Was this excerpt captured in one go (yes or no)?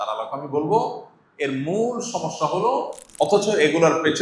no